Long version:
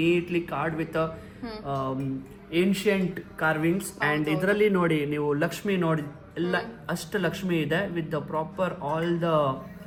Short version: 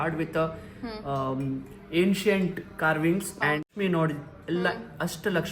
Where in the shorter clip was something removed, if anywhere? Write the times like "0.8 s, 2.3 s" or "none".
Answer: 3.6 s